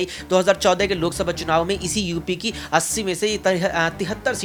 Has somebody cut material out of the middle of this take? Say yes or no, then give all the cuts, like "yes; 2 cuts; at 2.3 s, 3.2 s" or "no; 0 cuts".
no; 0 cuts